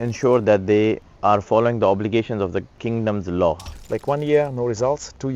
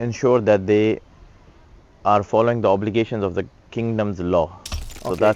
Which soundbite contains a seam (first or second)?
first